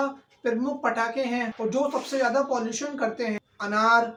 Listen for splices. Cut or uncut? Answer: uncut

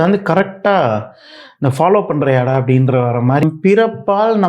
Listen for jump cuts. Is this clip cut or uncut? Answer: cut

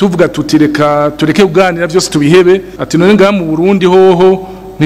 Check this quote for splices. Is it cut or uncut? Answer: cut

